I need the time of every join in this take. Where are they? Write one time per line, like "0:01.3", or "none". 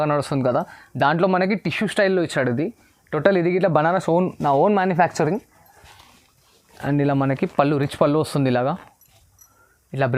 none

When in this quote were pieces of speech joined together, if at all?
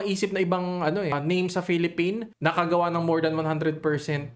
0:01.1
0:02.3

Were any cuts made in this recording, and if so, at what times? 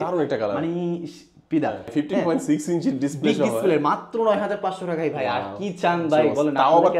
0:01.9

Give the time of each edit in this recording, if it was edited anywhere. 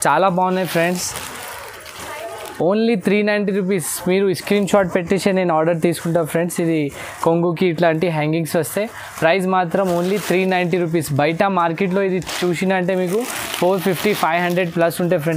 none

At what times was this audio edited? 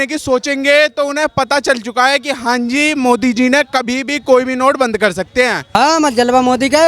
0:05.6

